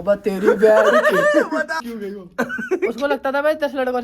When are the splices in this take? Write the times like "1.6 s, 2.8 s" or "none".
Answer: 1.8 s